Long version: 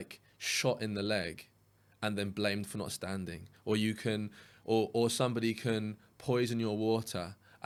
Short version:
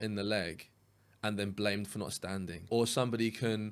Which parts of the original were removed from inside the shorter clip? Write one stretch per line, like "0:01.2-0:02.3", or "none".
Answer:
0:03.5-0:04.9